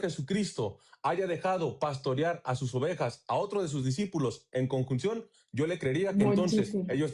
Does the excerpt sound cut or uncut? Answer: uncut